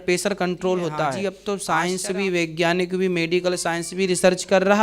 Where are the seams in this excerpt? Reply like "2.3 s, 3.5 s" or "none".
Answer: 1.2 s